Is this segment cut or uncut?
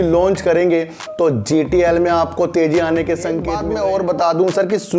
cut